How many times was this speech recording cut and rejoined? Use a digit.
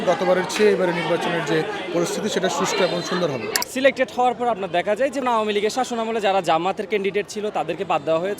2